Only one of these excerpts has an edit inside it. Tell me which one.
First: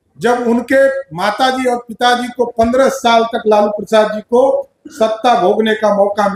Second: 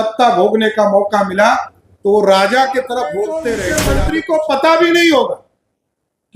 second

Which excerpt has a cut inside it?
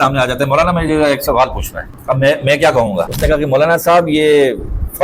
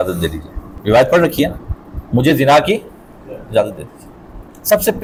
first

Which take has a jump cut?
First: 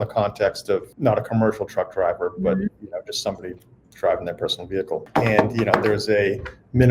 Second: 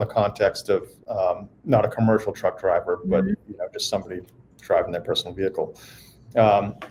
first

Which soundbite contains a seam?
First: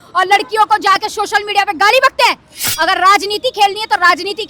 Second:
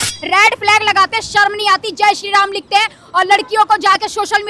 first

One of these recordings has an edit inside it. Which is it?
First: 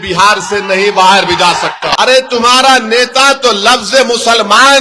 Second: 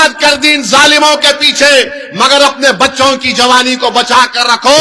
first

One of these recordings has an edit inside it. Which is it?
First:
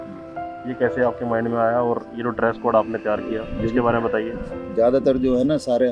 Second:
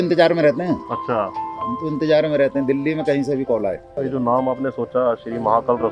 second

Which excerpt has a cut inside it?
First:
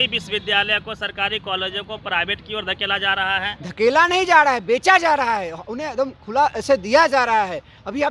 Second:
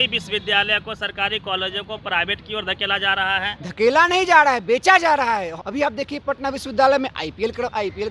second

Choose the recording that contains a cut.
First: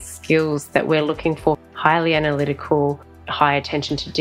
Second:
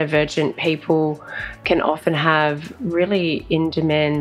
first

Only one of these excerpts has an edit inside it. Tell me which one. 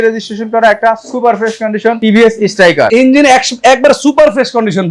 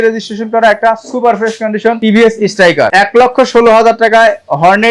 first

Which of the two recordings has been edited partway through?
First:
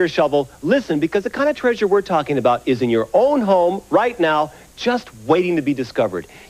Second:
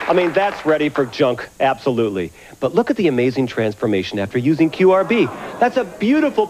second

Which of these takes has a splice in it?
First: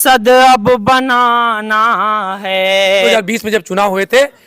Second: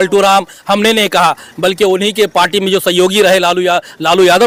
first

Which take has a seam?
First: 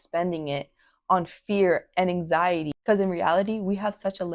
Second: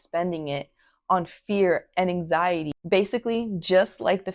second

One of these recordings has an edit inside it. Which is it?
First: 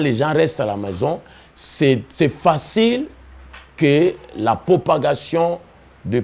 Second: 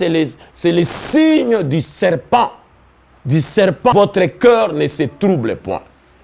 second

